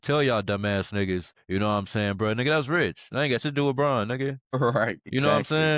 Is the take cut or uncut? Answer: cut